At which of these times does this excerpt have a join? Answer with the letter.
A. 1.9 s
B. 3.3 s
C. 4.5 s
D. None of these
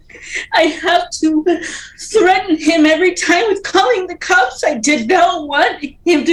D